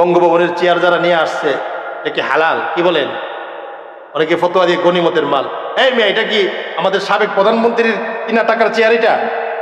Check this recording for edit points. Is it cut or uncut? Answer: uncut